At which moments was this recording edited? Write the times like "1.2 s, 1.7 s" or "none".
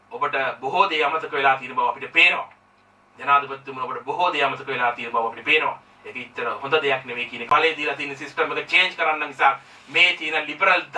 7.5 s

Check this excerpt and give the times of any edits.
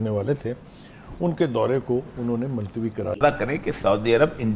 3.2 s

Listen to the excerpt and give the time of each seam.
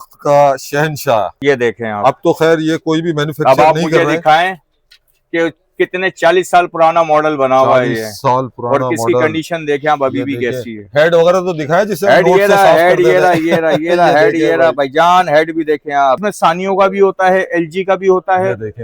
1.3 s, 16.3 s

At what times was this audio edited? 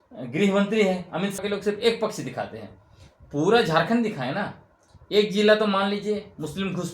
1.4 s

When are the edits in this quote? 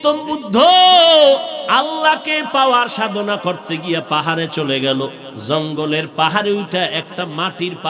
1.6 s, 5.3 s

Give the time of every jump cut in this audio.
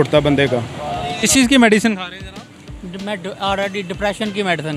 1.1 s

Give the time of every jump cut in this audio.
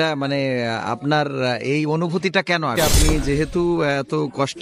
2.8 s

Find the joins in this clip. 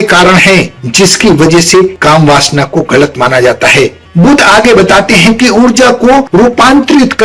4.0 s

